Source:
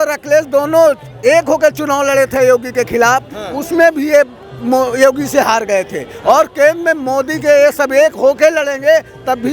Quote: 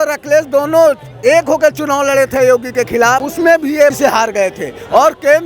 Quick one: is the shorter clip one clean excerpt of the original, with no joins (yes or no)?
no